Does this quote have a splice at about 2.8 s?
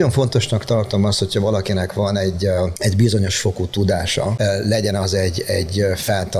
yes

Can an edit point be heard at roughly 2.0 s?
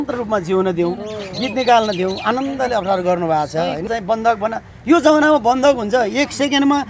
no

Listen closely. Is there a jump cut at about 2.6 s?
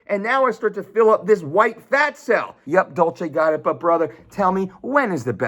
yes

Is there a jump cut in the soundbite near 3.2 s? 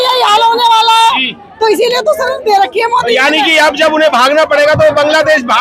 no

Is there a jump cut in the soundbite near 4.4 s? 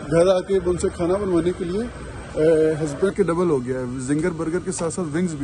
no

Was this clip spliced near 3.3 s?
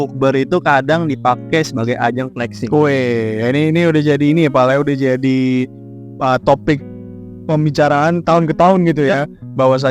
no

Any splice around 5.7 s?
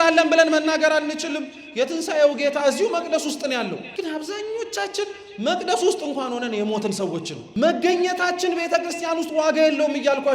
no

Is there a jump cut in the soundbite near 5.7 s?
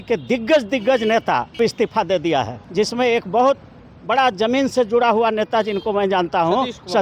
no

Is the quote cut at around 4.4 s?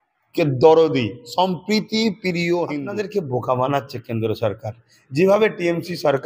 no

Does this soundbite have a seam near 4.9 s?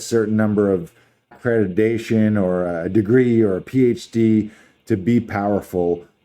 no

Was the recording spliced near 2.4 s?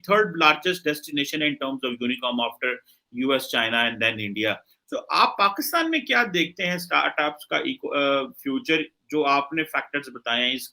no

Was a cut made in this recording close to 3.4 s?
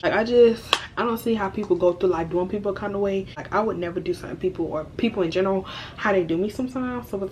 yes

